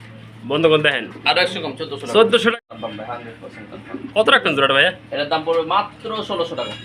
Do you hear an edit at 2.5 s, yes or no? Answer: yes